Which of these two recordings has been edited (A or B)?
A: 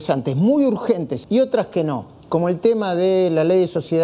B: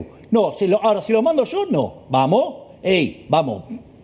A